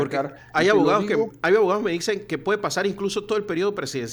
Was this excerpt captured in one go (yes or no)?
yes